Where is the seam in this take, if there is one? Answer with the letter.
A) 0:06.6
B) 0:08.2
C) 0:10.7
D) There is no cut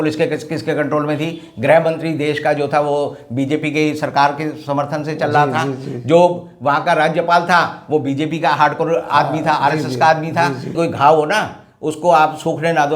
C